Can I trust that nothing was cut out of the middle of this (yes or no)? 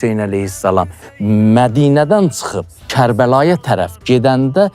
no